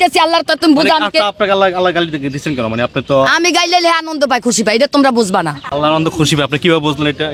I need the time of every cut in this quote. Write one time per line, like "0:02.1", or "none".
none